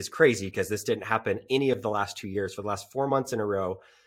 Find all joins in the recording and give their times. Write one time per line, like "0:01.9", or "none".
none